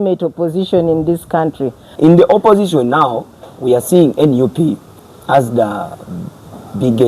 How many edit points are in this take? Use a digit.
1